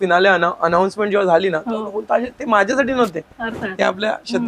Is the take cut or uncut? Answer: uncut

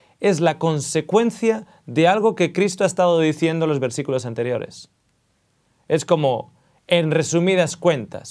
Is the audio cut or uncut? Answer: uncut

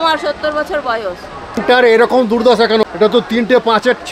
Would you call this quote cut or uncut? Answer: cut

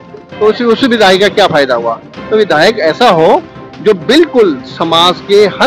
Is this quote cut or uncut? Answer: uncut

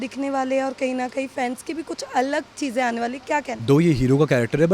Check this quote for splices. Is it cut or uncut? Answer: cut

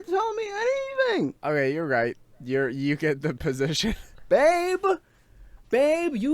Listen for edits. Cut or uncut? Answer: cut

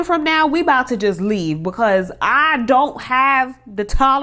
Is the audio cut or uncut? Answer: uncut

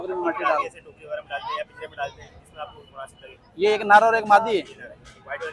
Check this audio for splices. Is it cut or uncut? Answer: uncut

